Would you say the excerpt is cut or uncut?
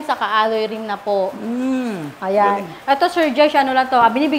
uncut